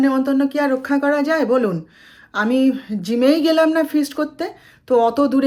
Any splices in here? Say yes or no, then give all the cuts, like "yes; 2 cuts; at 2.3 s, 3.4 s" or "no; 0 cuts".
no; 0 cuts